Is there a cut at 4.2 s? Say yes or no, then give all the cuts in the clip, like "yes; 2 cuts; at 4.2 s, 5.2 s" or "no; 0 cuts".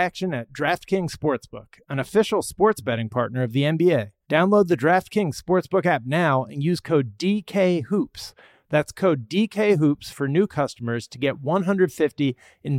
yes; 1 cut; at 4.2 s